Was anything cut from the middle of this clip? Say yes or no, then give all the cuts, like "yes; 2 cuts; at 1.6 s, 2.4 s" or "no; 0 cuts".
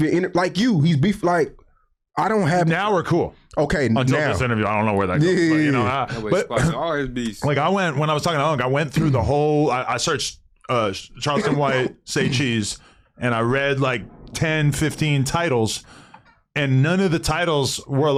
no; 0 cuts